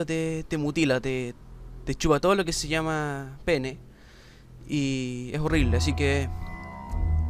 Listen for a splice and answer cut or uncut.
uncut